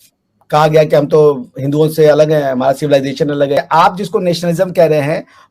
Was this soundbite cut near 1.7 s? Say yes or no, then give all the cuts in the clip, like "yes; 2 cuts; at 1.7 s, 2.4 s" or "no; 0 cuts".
no; 1 cut; at 3.6 s